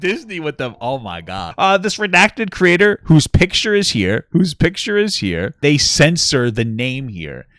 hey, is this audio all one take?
no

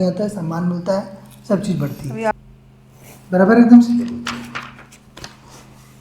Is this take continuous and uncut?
no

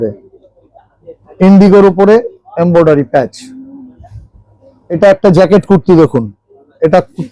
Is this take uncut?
no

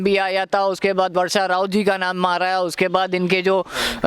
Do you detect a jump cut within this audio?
no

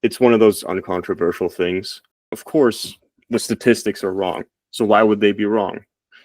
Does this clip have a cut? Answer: yes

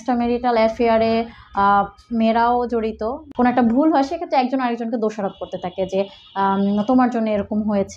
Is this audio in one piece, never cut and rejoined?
no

